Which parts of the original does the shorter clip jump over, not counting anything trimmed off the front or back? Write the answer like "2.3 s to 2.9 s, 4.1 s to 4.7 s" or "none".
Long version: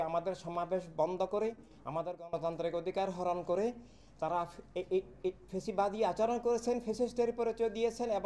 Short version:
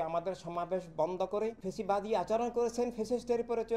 1.6 s to 5.5 s